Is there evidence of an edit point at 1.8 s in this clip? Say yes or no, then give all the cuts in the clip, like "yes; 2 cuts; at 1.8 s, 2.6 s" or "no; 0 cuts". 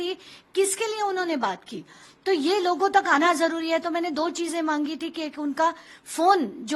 no; 0 cuts